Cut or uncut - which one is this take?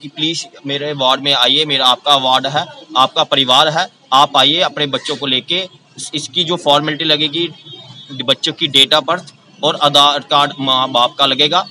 uncut